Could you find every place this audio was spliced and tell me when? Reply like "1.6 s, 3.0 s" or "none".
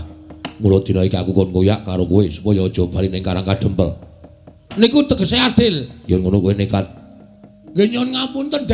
4.7 s

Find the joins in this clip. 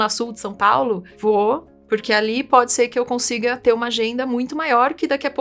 1.1 s

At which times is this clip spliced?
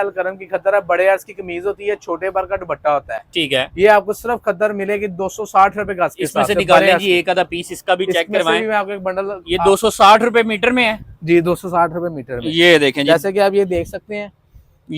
none

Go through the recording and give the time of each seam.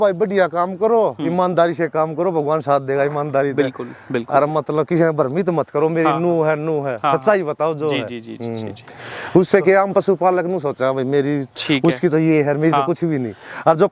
none

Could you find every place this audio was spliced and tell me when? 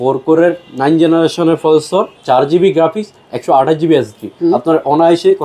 2.2 s, 4.3 s

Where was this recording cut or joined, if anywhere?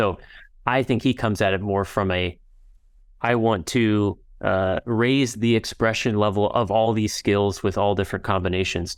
none

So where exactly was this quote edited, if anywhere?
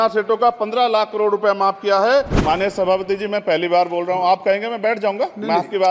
2.3 s

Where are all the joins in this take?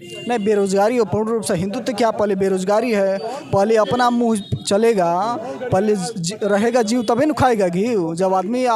none

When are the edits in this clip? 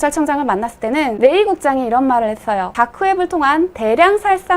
1.1 s, 2.7 s

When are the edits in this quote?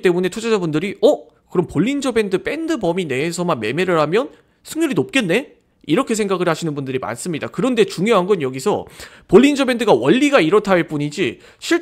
none

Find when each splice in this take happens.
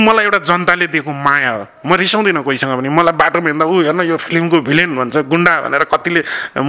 none

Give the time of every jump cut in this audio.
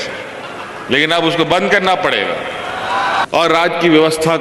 3.2 s

